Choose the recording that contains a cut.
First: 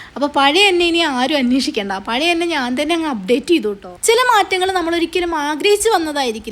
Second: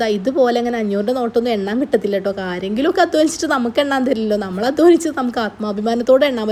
first; 1 cut; at 3.9 s

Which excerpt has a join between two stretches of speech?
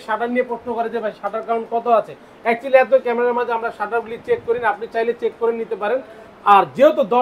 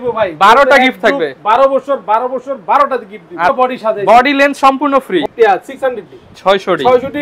second; 2 cuts; at 3.5 s, 5.2 s

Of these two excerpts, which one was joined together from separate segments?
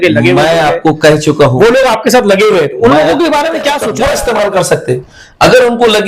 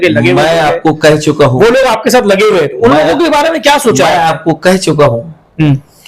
first; 1 cut; at 3.8 s

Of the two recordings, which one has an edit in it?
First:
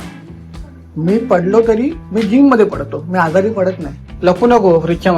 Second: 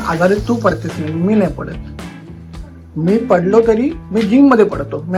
first; 1 cut; at 4.1 s

